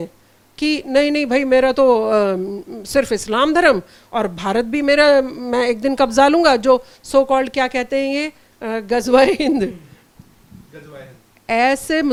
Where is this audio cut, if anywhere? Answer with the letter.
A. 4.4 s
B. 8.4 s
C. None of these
C